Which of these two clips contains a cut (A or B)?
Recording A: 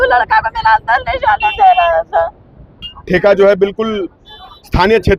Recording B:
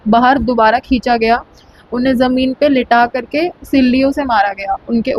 A